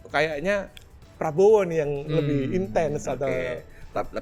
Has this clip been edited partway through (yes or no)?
no